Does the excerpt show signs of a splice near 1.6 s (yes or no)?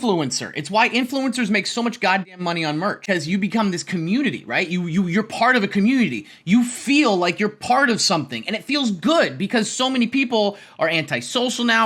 no